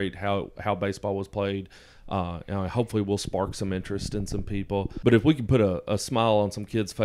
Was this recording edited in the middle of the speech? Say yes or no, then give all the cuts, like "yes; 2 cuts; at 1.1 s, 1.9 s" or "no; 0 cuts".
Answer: yes; 1 cut; at 4.9 s